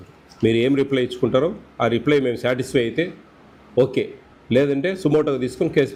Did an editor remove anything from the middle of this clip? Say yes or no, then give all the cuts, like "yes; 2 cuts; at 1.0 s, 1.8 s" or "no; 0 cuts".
no; 0 cuts